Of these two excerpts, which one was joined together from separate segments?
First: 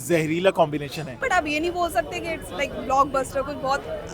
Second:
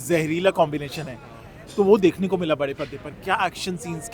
first; 1 cut; at 1.1 s

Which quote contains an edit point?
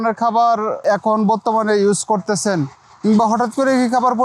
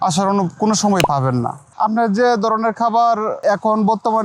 second; 1 cut; at 1.6 s

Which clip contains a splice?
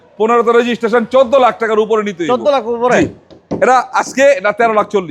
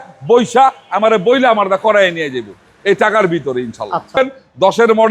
second; 1 cut; at 4.2 s

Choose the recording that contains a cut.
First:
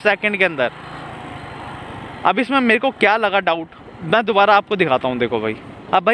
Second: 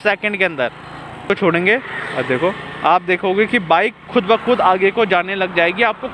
second; 1 cut; at 1.3 s

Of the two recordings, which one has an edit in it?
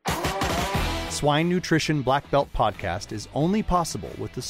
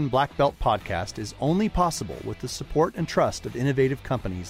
first; 1 cut; at 1.0 s

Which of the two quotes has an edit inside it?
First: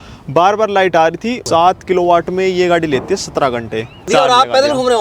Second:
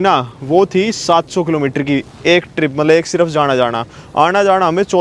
first; 2 cuts; at 1.4 s, 4.1 s

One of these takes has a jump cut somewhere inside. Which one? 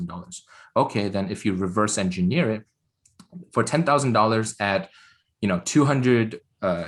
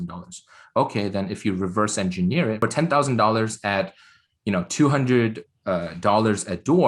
second; 1 cut; at 2.6 s

